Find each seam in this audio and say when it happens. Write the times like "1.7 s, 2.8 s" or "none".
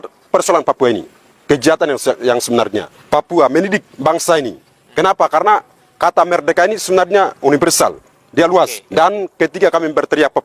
2.9 s, 9.0 s